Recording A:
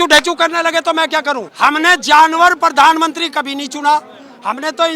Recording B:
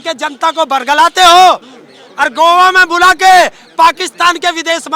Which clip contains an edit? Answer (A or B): A